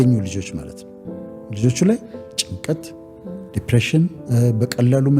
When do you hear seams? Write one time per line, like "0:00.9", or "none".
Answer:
0:04.2